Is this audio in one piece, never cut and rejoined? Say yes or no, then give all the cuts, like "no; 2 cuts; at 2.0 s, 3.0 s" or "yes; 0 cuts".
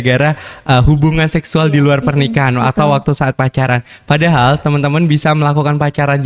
yes; 0 cuts